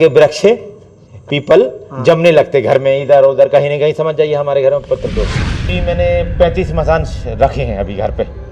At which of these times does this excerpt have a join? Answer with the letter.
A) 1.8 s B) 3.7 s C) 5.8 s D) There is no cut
C